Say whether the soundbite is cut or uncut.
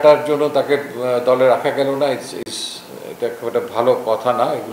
uncut